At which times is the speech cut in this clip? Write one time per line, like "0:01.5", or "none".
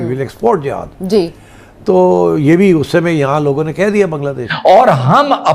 0:04.4